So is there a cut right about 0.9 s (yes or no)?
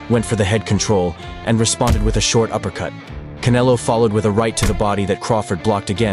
no